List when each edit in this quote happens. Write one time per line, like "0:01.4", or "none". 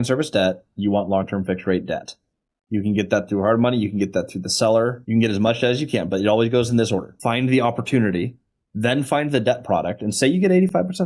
0:05.0
0:07.1